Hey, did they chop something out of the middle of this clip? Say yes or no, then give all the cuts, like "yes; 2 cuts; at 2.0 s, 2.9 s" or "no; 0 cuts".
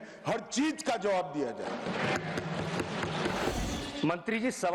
yes; 1 cut; at 3.5 s